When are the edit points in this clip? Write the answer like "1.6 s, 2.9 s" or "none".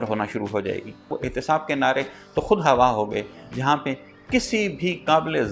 1.1 s